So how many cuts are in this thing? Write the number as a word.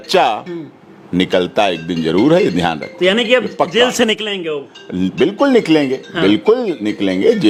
zero